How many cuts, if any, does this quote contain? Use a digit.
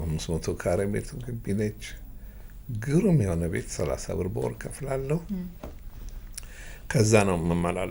0